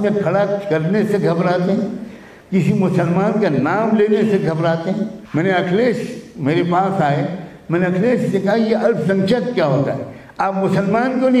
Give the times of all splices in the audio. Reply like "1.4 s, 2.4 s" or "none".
5.2 s

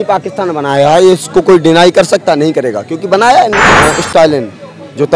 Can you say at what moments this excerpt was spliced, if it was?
3.7 s

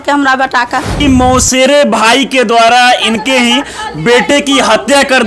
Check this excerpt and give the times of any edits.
1.0 s

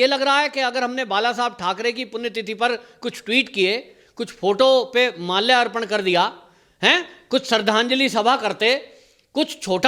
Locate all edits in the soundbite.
none

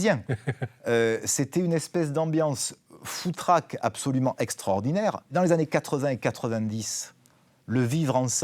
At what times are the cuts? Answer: 5.2 s

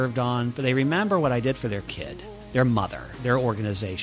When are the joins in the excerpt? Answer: 2.5 s, 3.1 s

